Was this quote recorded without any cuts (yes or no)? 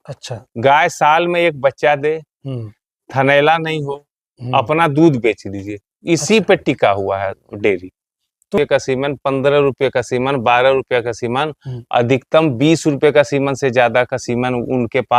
no